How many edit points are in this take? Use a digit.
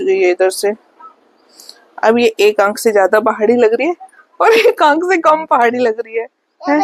0